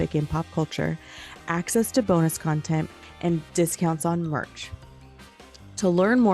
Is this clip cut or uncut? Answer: cut